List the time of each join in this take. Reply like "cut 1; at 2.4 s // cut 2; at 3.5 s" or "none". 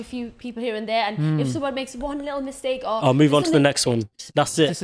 none

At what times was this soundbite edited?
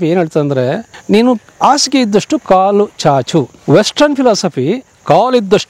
cut 1; at 0.9 s // cut 2; at 3.6 s

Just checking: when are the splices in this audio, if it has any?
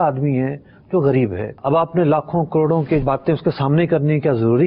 cut 1; at 1.5 s // cut 2; at 3.0 s

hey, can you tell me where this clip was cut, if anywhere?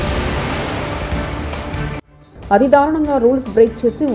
cut 1; at 2.0 s

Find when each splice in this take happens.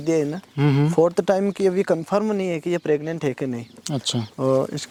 none

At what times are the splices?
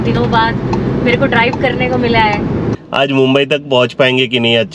cut 1; at 2.7 s

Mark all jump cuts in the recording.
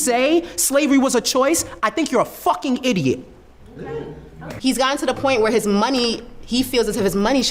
cut 1; at 4.4 s

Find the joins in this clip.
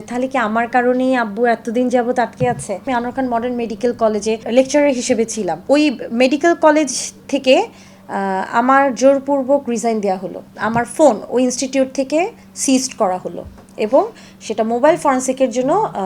none

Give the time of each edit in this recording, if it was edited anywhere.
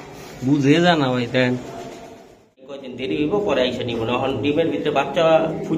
cut 1; at 2.7 s

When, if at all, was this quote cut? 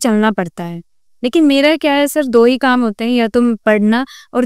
none

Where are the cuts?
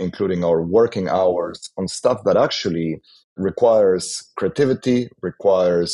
cut 1; at 3.3 s

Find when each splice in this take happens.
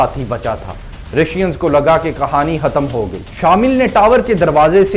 cut 1; at 3.3 s

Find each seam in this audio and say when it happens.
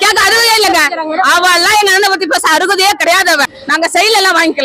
cut 1; at 3.6 s

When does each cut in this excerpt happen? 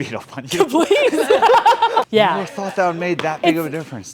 cut 1; at 2.0 s

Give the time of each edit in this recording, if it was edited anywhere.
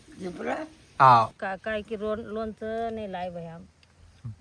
cut 1; at 1.4 s

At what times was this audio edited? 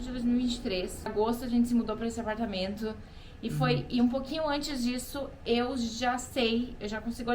cut 1; at 1.0 s

